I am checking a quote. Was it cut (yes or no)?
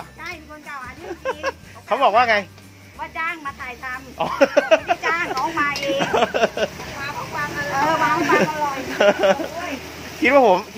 no